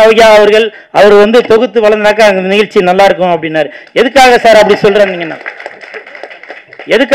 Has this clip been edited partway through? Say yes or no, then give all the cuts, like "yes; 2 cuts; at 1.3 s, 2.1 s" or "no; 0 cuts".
no; 0 cuts